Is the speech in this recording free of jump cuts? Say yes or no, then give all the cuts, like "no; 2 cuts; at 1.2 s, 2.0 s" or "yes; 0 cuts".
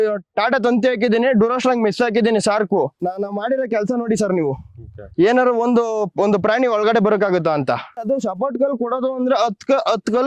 no; 2 cuts; at 3.0 s, 8.0 s